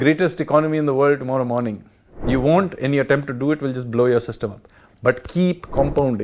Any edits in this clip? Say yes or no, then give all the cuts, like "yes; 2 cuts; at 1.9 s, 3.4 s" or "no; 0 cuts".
no; 0 cuts